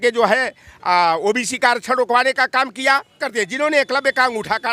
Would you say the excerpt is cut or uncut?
cut